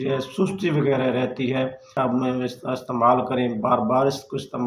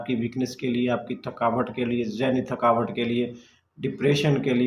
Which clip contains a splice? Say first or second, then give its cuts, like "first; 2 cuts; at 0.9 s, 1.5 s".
first; 1 cut; at 1.8 s